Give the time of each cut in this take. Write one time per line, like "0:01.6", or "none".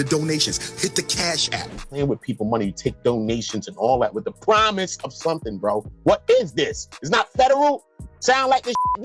0:01.8